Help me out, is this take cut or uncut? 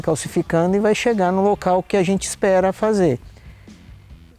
uncut